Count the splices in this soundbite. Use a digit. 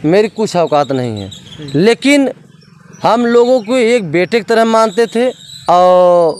1